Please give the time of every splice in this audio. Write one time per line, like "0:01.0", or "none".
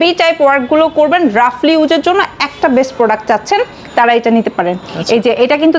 none